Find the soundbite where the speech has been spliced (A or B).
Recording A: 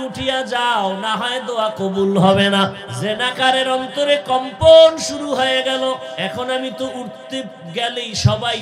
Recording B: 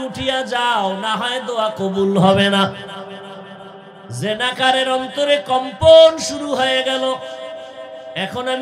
A